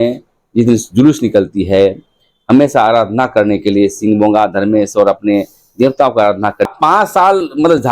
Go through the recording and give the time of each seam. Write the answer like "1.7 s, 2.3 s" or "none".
6.7 s